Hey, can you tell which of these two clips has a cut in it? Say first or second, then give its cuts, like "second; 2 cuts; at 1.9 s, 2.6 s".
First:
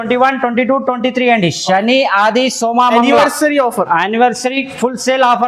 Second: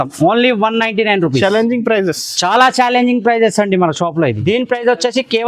second; 1 cut; at 4.4 s